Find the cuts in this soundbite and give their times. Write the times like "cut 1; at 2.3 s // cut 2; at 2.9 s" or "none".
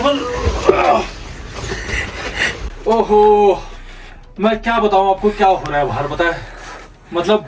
cut 1; at 2.7 s